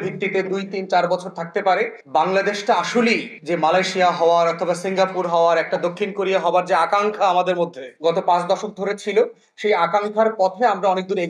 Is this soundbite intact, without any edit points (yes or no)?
yes